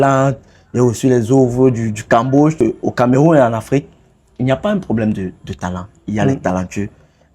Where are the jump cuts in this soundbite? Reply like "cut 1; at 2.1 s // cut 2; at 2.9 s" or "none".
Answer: cut 1; at 2.6 s